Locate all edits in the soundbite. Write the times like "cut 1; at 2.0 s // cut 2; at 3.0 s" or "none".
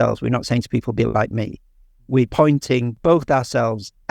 cut 1; at 2.6 s